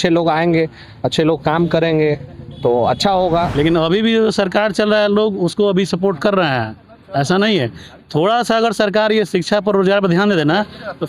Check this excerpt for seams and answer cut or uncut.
cut